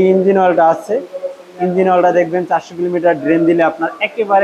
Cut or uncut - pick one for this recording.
uncut